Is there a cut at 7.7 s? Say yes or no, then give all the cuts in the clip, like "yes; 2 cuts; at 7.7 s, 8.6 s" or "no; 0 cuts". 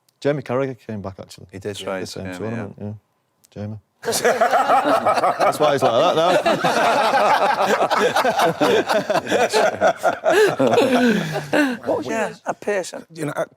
no; 1 cut; at 12.1 s